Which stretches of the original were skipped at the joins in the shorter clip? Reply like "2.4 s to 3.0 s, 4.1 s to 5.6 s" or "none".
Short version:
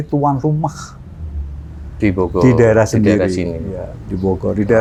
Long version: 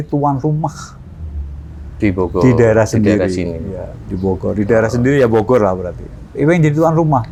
none